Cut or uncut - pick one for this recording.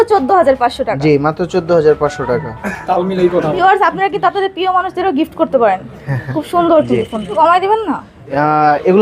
cut